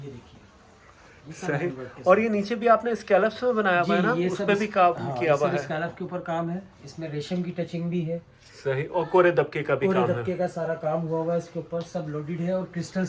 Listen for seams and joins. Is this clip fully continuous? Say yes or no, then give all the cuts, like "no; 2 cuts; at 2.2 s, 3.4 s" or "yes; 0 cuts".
yes; 0 cuts